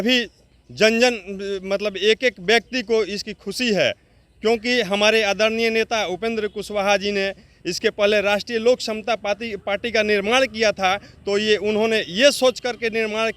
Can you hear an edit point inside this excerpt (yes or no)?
no